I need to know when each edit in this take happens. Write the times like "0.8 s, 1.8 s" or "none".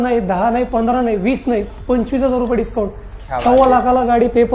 none

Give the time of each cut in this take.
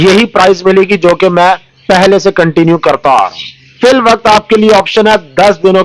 3.7 s

